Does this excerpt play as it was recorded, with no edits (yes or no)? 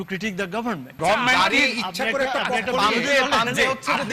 no